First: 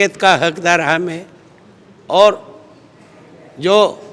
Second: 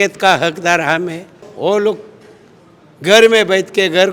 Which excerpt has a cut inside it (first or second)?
second